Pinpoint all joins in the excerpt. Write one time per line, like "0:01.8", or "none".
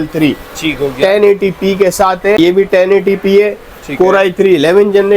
0:02.4